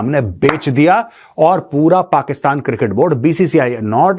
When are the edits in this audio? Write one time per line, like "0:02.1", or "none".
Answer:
none